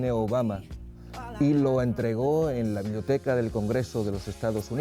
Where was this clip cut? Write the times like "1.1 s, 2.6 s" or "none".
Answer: none